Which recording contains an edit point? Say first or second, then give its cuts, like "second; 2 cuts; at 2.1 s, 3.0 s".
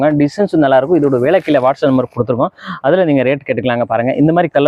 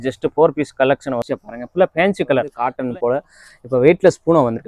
second; 2 cuts; at 1.2 s, 2.5 s